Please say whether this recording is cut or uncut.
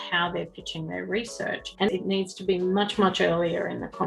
cut